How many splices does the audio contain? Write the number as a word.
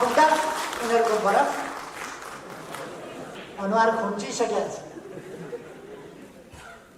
one